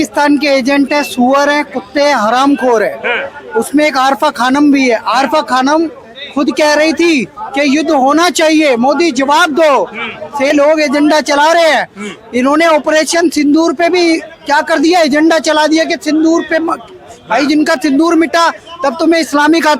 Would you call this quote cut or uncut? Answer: cut